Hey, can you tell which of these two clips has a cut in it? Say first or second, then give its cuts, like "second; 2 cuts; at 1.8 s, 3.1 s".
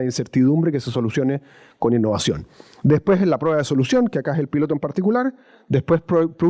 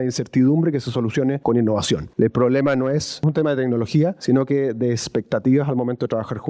second; 4 cuts; at 1.4 s, 2.1 s, 3.2 s, 4.2 s